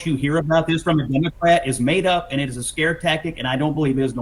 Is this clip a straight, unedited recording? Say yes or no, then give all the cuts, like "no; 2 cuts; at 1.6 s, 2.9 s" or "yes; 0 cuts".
yes; 0 cuts